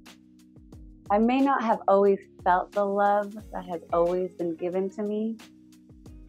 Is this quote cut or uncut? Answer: cut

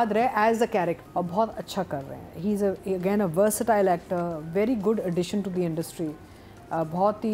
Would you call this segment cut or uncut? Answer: cut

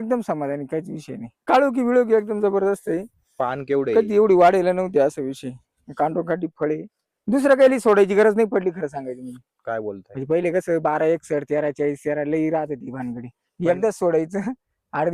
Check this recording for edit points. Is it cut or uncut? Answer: cut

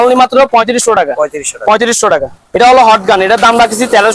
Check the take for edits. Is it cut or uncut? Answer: cut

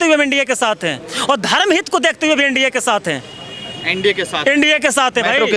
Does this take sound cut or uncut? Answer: uncut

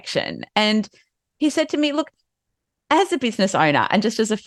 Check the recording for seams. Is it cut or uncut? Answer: uncut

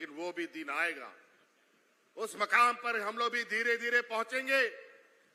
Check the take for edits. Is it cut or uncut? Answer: uncut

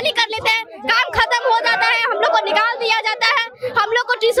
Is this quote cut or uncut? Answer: uncut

